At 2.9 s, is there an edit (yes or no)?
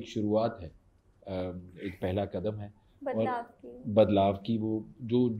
no